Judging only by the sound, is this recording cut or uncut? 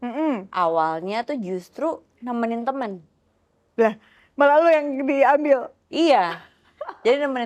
uncut